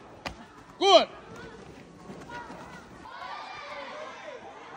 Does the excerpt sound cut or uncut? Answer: cut